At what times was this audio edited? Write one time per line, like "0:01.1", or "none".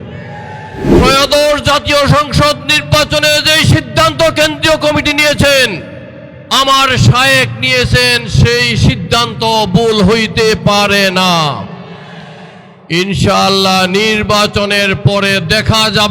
0:01.0